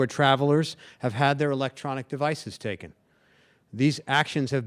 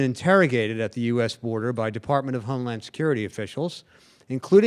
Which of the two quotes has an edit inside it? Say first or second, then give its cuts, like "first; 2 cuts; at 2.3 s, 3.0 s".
second; 1 cut; at 2.7 s